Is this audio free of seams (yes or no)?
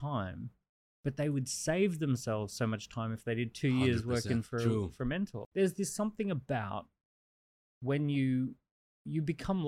no